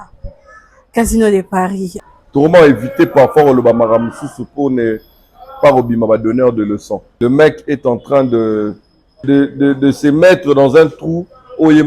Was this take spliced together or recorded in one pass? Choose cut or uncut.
cut